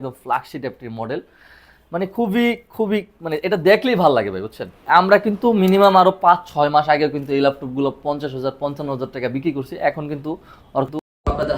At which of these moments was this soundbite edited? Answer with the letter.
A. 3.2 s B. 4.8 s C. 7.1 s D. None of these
B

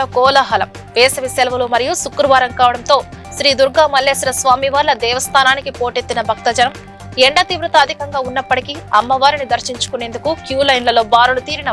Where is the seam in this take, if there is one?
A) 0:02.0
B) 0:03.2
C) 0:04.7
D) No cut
D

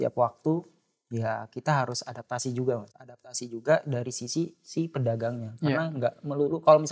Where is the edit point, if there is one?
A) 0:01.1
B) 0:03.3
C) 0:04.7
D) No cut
B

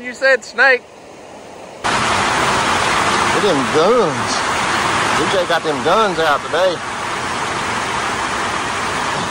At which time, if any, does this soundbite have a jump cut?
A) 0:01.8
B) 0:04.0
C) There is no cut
A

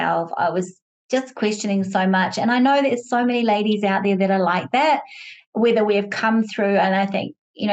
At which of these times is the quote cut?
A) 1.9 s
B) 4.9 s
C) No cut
C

